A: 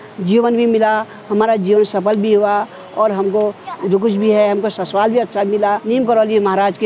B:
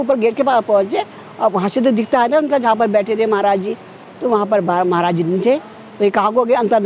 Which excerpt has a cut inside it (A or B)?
A